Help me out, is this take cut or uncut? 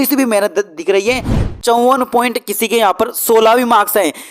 cut